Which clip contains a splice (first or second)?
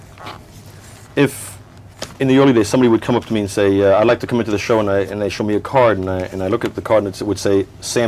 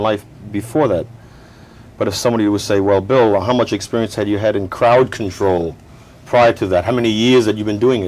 second